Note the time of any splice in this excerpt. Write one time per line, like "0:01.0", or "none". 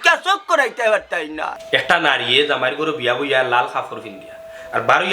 0:01.5